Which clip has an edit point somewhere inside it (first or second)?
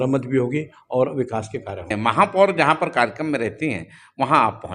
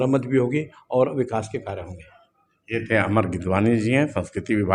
first